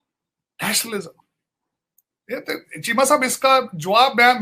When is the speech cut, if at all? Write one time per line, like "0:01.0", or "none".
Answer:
none